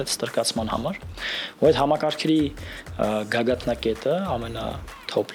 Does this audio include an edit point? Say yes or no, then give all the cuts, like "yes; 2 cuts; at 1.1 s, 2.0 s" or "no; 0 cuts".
no; 0 cuts